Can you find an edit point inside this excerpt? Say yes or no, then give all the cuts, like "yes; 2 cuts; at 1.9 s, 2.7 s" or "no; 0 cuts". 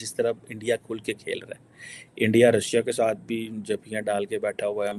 no; 0 cuts